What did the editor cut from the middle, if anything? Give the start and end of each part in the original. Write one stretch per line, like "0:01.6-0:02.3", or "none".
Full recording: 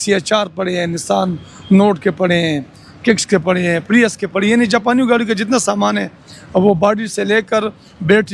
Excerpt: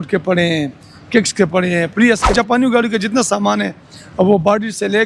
0:04.3-0:04.7